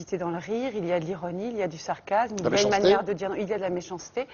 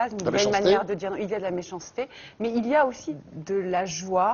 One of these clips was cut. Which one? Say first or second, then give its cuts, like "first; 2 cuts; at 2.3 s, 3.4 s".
second; 1 cut; at 3.1 s